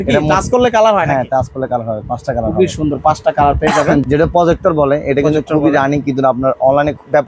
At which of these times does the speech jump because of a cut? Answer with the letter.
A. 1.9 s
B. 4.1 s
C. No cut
B